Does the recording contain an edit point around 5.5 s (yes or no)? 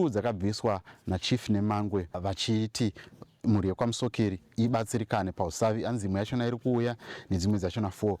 no